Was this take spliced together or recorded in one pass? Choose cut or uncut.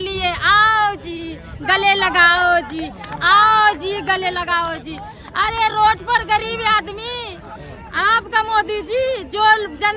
uncut